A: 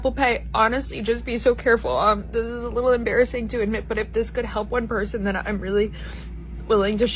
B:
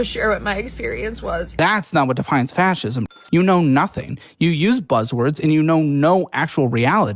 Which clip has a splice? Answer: B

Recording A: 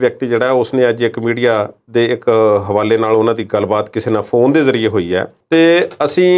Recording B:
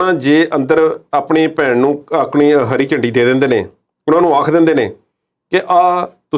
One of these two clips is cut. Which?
A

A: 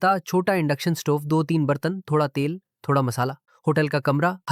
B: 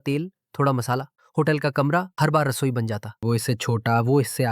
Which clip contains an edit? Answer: B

